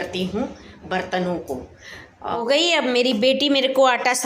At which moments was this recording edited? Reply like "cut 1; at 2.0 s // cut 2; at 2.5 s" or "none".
cut 1; at 2.3 s